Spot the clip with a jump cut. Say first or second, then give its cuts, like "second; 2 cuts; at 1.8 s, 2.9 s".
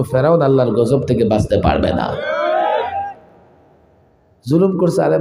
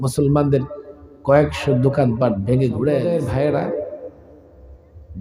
second; 1 cut; at 3.1 s